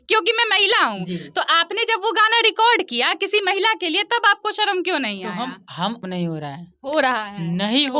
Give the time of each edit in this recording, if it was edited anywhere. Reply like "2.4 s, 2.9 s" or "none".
6.0 s